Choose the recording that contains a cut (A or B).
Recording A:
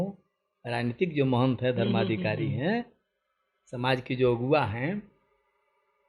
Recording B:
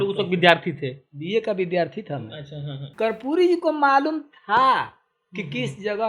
B